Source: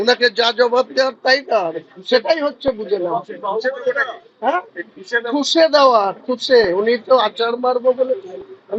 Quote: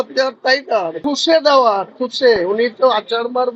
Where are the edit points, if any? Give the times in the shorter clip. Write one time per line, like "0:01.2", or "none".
0:01.0

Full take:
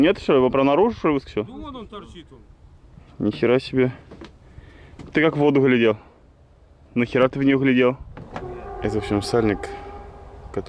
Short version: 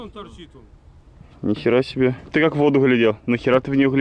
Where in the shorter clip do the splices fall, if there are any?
0:02.2
0:03.2

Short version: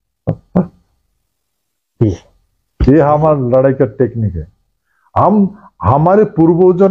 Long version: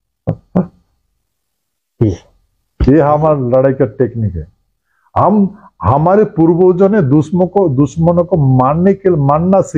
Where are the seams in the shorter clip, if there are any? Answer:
none

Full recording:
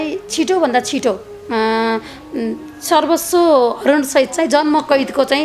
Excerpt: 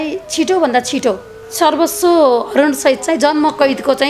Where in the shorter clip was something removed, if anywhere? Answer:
0:01.4

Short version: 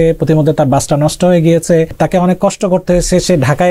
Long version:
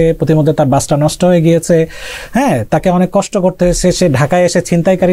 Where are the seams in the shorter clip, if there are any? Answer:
0:01.9

